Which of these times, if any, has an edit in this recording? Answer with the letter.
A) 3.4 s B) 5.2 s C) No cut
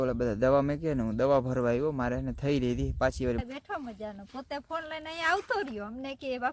A